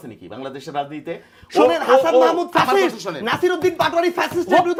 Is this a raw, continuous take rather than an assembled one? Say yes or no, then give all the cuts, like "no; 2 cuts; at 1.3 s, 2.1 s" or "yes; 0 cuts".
yes; 0 cuts